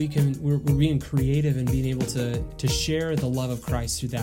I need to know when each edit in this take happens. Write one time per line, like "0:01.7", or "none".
0:02.5

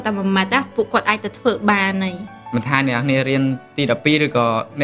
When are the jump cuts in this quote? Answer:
0:02.4

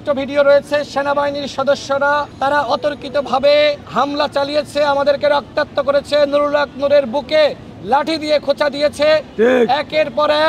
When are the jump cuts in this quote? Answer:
0:03.8

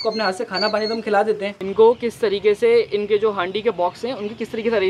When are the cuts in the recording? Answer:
0:01.6

